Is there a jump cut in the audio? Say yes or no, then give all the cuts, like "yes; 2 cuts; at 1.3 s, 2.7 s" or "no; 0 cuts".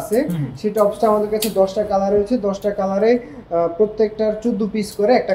no; 0 cuts